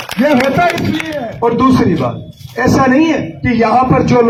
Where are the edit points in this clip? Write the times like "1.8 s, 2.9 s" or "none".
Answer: none